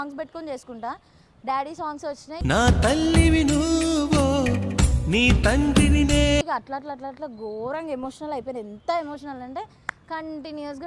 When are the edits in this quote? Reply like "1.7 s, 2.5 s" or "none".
none